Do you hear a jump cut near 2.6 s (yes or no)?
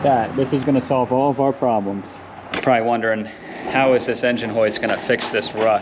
yes